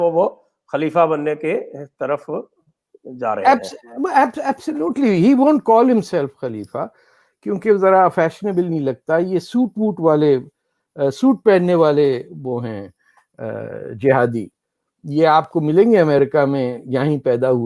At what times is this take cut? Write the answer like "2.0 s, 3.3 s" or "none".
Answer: none